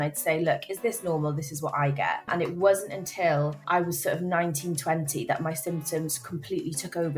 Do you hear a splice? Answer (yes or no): yes